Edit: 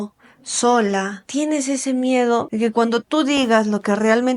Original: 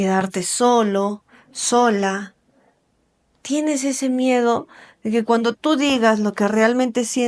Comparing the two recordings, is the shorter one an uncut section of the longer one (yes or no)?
no